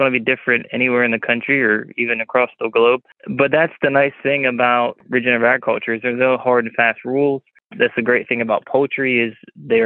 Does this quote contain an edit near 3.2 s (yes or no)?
yes